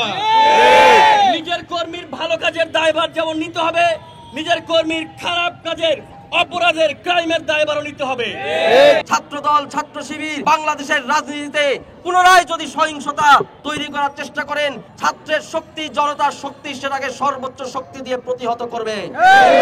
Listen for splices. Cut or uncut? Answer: cut